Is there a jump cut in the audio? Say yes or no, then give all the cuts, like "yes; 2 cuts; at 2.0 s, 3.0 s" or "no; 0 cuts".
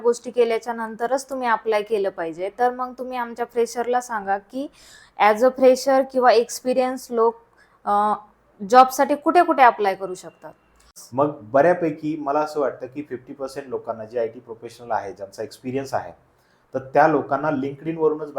yes; 1 cut; at 11.0 s